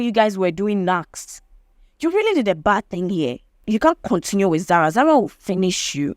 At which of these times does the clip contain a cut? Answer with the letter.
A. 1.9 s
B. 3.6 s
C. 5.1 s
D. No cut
B